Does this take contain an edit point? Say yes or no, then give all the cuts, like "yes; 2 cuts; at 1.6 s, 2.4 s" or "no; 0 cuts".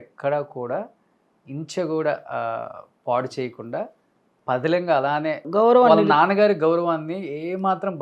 no; 0 cuts